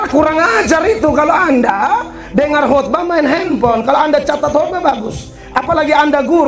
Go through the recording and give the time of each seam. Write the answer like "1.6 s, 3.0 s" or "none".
none